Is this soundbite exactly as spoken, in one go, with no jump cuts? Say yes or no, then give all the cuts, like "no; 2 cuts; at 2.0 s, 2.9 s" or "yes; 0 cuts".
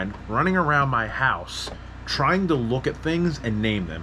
yes; 0 cuts